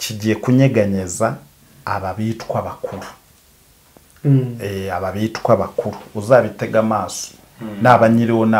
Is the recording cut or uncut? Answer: uncut